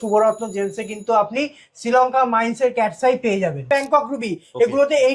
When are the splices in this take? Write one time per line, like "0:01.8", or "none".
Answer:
0:03.7